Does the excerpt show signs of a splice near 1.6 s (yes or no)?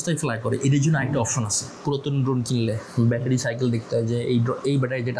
yes